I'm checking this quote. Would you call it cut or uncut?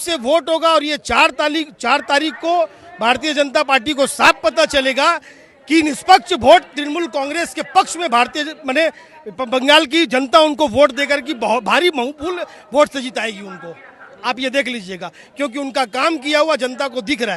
uncut